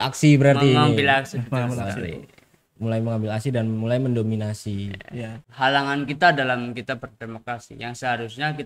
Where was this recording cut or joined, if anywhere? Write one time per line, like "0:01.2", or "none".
0:05.4